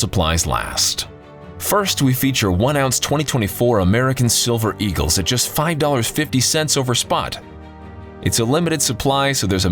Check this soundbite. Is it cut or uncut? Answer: uncut